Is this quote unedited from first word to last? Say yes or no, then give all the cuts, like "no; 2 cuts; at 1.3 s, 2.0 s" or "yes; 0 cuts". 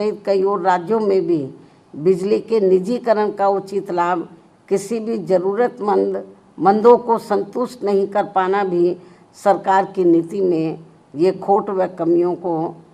yes; 0 cuts